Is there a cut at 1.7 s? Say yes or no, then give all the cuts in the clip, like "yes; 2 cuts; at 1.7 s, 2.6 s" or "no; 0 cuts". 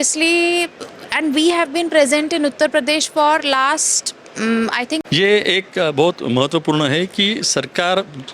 no; 1 cut; at 5.0 s